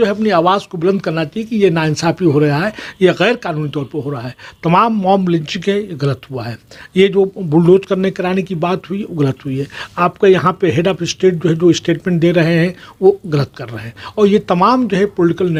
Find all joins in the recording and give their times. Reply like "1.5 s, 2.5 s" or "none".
none